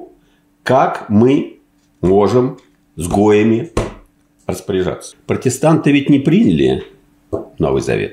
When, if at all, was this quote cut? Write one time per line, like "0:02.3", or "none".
0:05.1